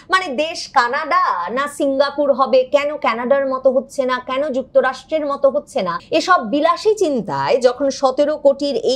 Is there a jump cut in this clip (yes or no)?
yes